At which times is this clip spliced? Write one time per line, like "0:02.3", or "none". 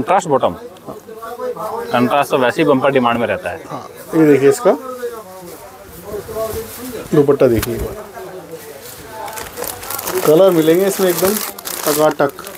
none